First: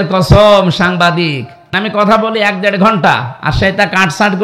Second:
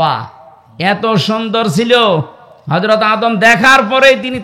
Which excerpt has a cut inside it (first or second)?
first